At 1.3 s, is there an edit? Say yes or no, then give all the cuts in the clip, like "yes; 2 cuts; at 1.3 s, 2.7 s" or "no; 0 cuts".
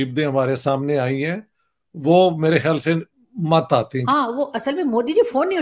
no; 1 cut; at 4.0 s